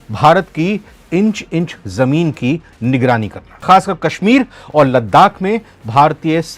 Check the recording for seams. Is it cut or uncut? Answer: cut